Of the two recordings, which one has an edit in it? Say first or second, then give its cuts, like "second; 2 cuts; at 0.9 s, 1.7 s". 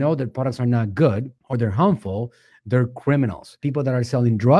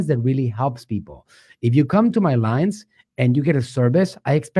first; 1 cut; at 1.4 s